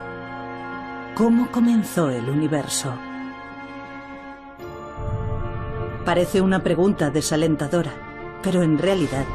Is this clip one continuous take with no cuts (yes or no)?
no